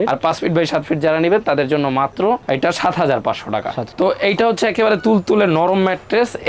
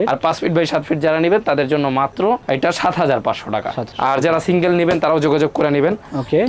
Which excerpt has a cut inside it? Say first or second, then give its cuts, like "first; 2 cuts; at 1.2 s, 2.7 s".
first; 1 cut; at 3.8 s